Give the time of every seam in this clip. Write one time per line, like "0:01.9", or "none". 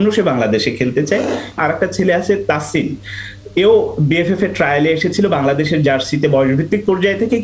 0:01.6